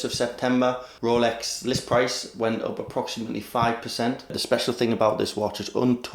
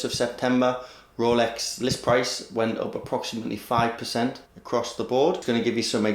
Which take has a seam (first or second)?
first